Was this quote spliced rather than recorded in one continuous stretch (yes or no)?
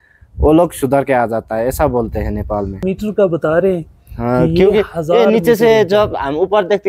yes